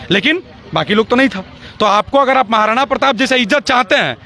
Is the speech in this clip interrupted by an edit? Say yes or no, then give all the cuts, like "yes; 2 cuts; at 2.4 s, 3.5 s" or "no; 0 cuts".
no; 0 cuts